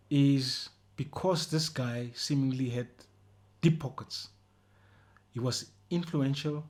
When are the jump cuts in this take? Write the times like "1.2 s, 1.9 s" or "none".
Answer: none